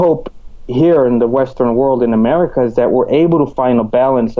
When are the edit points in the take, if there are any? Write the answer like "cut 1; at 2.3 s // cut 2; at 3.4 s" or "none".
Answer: none